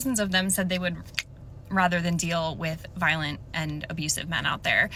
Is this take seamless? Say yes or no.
yes